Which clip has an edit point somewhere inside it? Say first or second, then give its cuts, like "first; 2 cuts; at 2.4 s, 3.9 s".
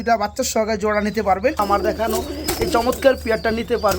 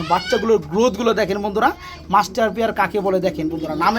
first; 1 cut; at 1.6 s